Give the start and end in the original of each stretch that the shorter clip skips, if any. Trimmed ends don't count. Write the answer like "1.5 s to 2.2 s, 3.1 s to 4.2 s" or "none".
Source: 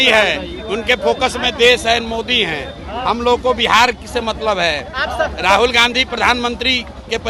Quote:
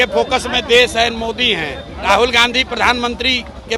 2.9 s to 5.4 s

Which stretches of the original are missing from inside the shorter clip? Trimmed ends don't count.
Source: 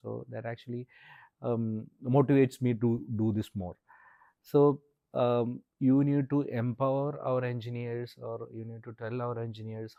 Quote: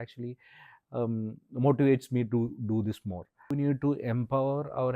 4.1 s to 6.0 s

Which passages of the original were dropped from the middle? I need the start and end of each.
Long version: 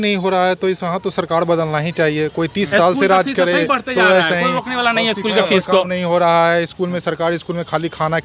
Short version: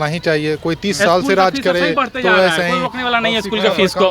none

